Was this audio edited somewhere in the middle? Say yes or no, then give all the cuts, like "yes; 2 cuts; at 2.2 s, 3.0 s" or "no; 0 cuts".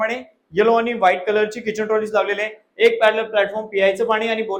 no; 0 cuts